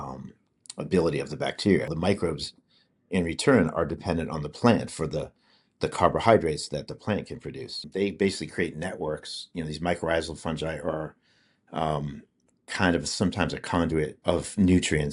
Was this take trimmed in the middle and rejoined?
yes; 3 cuts; at 2.0 s, 7.8 s, 14.2 s

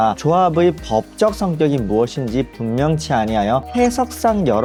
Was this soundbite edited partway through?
no; 0 cuts

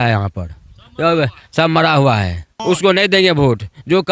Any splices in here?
yes; 1 cut; at 2.5 s

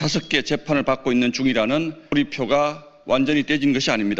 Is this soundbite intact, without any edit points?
no; 1 cut; at 2.0 s

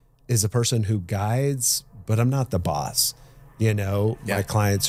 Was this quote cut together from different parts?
no; 0 cuts

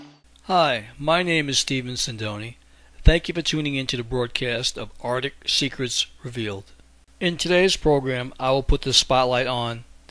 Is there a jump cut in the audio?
yes; 1 cut; at 4.5 s

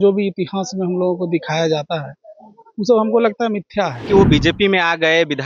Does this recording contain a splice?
yes; 1 cut; at 4.0 s

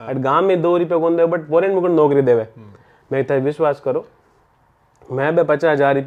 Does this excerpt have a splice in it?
no; 0 cuts

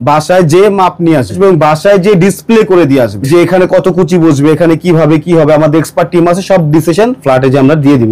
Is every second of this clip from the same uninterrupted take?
no; 2 cuts; at 1.4 s, 3.2 s

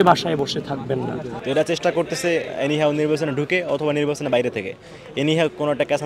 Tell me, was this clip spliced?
yes; 1 cut; at 1.3 s

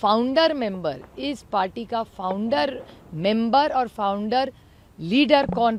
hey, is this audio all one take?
yes; 0 cuts

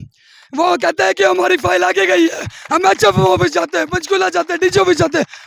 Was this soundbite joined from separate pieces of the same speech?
no; 0 cuts

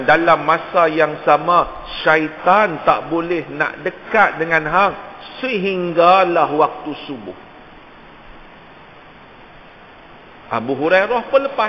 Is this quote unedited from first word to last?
yes; 0 cuts

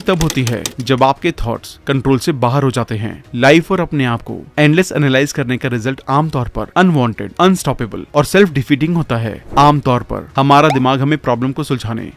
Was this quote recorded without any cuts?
yes; 0 cuts

